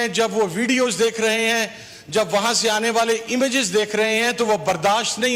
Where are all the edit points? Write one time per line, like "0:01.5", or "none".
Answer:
none